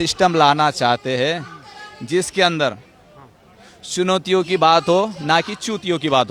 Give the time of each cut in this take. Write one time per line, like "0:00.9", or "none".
none